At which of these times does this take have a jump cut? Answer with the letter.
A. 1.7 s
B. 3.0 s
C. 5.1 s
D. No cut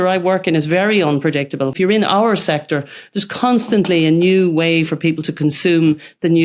A